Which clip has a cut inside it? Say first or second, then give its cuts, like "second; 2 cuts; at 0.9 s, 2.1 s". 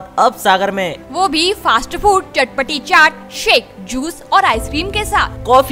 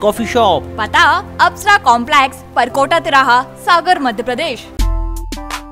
second; 1 cut; at 4.7 s